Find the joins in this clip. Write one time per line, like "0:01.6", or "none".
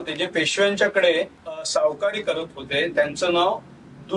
0:01.6